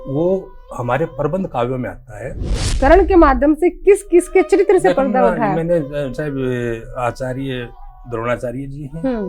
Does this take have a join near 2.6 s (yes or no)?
yes